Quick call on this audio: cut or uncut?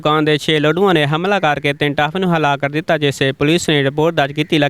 uncut